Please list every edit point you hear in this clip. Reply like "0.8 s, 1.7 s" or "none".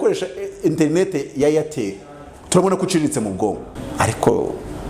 3.8 s